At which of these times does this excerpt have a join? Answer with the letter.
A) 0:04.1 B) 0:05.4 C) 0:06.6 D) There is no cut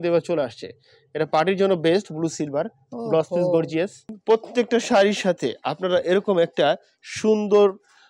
A